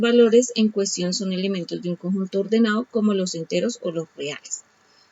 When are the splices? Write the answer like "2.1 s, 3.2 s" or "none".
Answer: 3.9 s